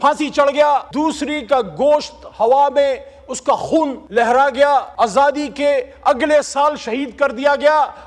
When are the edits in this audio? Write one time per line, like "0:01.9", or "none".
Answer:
0:00.9
0:04.0
0:04.9